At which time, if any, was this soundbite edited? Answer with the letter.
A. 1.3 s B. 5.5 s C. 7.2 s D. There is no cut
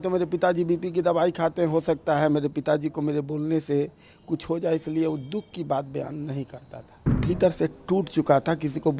C